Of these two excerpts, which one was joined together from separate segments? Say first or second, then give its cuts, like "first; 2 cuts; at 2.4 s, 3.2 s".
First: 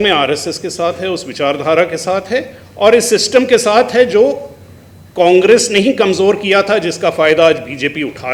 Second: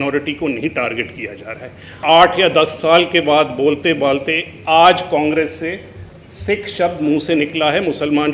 second; 1 cut; at 1.9 s